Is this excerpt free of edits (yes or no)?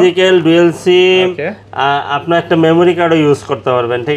yes